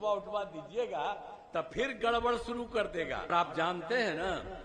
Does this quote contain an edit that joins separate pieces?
yes; 1 cut; at 3.3 s

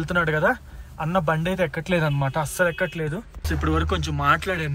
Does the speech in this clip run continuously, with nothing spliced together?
yes; 0 cuts

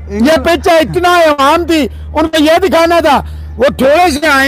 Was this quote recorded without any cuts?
yes; 0 cuts

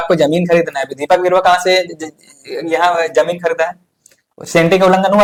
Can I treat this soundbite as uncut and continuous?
yes; 0 cuts

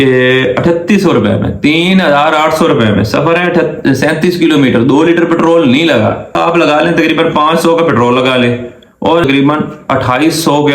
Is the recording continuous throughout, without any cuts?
no; 2 cuts; at 6.4 s, 9.2 s

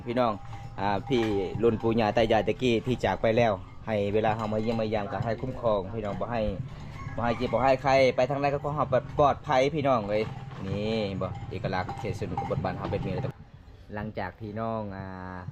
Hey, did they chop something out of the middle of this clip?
no; 0 cuts

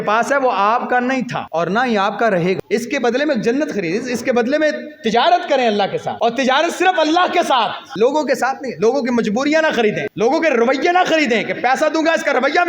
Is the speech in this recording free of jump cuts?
no; 5 cuts; at 1.4 s, 2.6 s, 6.1 s, 7.8 s, 10.1 s

